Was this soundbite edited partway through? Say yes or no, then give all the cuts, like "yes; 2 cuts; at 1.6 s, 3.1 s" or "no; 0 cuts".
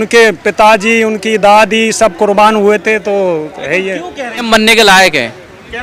yes; 1 cut; at 4.4 s